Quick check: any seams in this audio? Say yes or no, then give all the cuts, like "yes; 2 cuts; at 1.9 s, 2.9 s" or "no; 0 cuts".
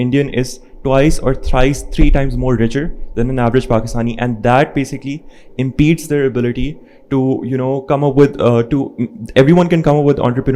no; 0 cuts